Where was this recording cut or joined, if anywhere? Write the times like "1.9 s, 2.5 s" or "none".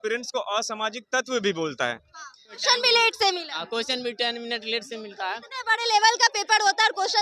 2.6 s